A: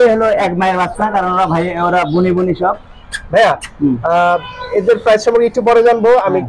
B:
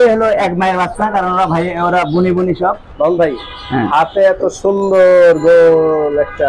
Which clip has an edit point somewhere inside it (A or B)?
B